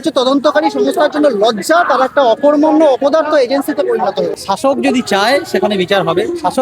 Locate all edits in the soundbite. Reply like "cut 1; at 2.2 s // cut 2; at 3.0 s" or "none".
cut 1; at 4.4 s